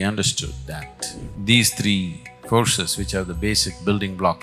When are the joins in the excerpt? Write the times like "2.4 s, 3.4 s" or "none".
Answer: 1.3 s